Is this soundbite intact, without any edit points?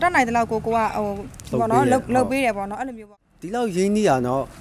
no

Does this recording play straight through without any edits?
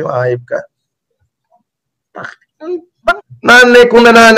no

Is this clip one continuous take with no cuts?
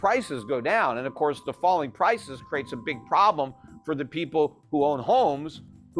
yes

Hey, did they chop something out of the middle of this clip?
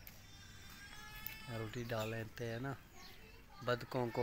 no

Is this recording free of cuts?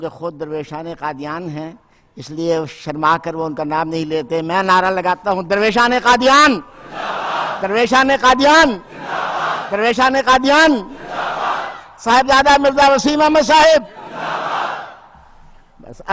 yes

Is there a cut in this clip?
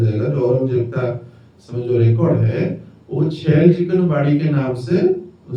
no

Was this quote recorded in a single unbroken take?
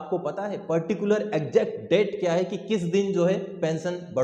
yes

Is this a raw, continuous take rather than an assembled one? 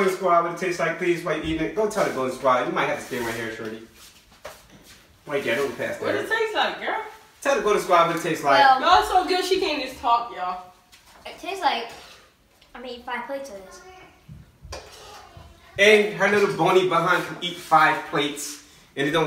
yes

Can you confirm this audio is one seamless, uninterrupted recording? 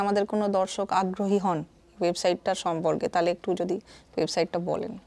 yes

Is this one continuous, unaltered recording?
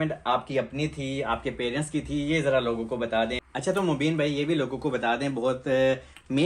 no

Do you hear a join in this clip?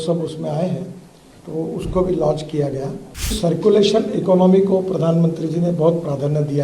yes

